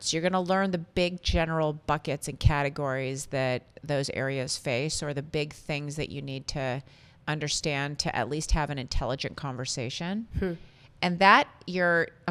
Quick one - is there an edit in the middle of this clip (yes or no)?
no